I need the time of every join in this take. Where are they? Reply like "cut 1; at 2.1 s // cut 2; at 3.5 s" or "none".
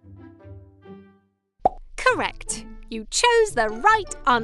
cut 1; at 0.9 s